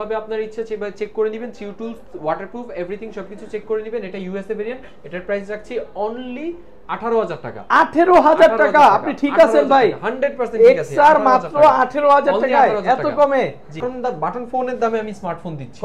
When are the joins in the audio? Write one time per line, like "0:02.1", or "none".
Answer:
0:13.8